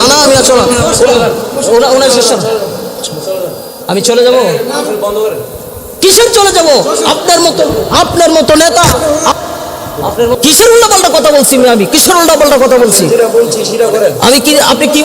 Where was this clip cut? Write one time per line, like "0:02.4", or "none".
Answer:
0:10.4